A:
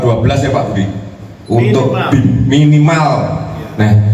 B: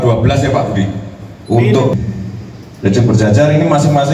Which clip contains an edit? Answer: B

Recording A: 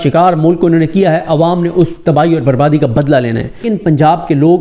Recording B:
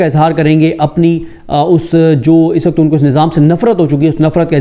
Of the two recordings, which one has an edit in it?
A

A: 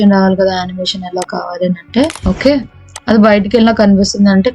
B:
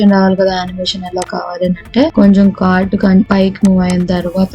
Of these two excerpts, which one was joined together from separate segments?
A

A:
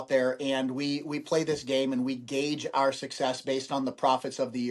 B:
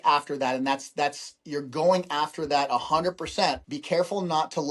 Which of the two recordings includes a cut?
B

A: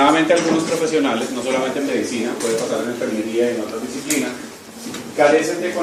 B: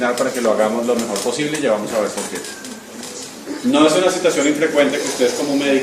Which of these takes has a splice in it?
B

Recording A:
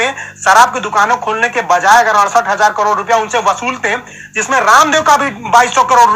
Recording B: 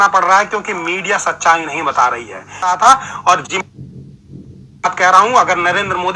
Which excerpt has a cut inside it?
B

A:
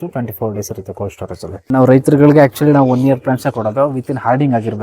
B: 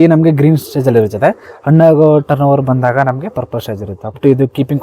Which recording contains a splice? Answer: A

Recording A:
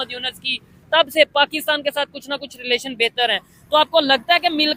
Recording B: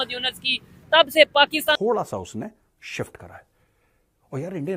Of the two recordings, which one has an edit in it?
B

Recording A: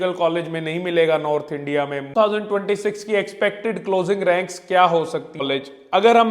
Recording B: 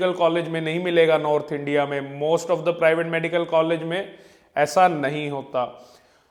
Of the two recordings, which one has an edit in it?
A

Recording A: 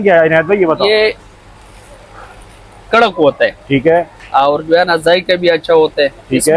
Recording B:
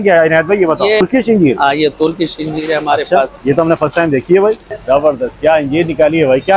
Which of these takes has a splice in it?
B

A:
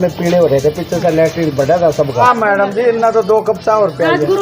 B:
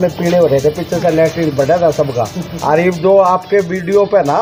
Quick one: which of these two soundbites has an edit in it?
A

